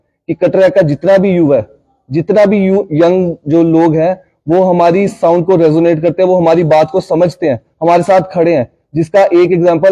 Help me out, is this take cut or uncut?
uncut